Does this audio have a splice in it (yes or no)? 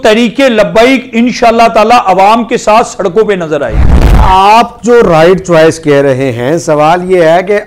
yes